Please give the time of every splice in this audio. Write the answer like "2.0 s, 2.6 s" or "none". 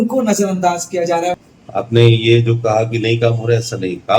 1.4 s